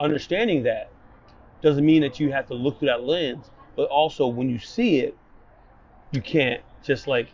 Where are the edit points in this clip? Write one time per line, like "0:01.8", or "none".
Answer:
none